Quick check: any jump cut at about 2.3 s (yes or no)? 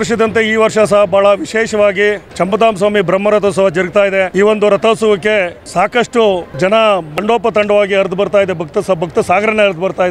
yes